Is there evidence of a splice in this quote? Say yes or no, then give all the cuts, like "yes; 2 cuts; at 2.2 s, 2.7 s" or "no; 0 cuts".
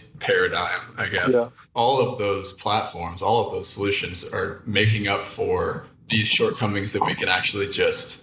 yes; 1 cut; at 1.6 s